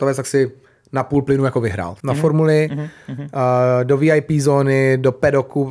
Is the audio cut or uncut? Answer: cut